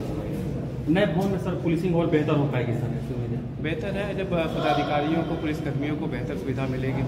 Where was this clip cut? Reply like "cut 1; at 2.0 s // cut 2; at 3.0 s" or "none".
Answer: none